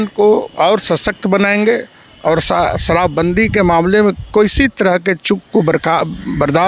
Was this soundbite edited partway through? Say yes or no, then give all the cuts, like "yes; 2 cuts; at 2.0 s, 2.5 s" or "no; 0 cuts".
no; 0 cuts